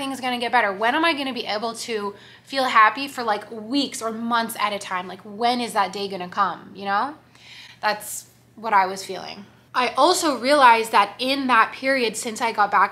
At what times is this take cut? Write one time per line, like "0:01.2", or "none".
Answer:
none